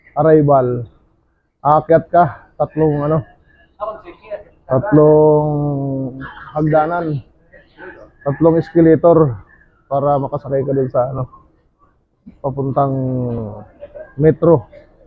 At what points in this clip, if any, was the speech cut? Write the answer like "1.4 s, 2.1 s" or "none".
none